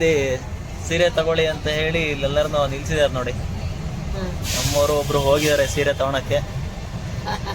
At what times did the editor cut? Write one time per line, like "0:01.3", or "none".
none